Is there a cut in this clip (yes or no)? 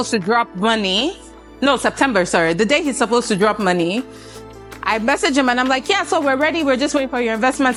no